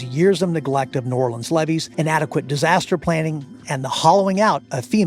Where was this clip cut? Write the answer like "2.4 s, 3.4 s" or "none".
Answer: 1.9 s